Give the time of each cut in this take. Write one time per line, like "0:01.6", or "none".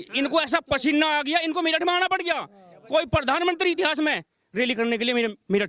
none